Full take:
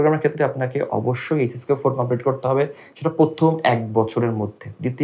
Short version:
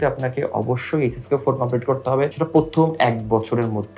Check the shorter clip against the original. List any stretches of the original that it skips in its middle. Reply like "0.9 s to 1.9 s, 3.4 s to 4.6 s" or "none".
2.7 s to 3.0 s